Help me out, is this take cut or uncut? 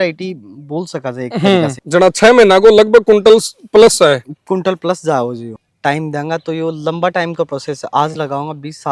cut